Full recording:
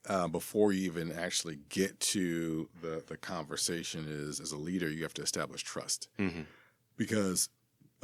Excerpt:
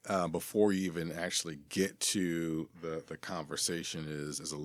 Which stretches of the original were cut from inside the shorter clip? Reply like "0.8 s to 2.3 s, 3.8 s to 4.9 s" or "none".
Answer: none